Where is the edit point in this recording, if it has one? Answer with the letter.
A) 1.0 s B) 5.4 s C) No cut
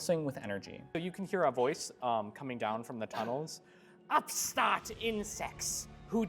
A